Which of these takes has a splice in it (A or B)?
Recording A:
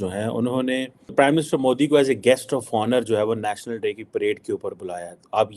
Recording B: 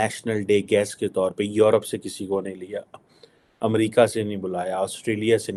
A